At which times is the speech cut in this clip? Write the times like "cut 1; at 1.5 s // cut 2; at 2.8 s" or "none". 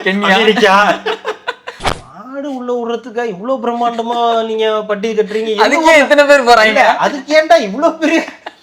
cut 1; at 1.9 s